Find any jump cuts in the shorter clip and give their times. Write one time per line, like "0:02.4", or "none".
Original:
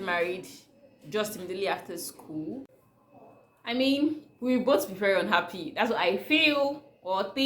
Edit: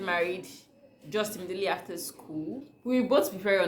0:02.7